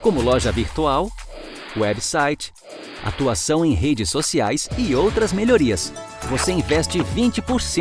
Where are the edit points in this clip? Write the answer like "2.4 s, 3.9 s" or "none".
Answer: none